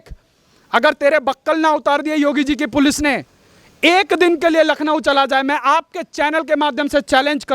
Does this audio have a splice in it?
no; 0 cuts

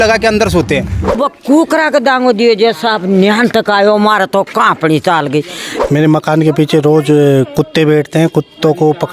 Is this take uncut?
no; 2 cuts; at 1.2 s, 5.6 s

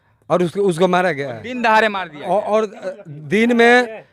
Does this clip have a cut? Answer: yes; 1 cut; at 1.4 s

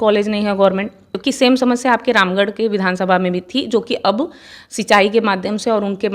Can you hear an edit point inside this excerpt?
yes; 1 cut; at 1.1 s

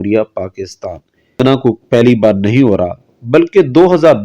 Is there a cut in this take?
yes; 1 cut; at 1.4 s

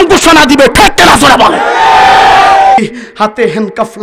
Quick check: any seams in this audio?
yes; 1 cut; at 2.8 s

